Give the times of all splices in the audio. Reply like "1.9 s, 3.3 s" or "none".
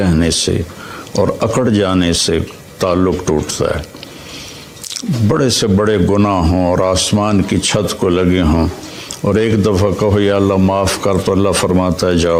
none